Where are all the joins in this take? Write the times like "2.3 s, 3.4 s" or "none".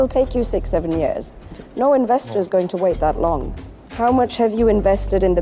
none